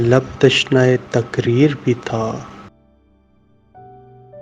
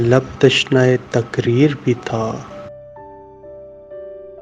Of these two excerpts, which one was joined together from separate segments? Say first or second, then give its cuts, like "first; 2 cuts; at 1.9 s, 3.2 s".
first; 1 cut; at 3.0 s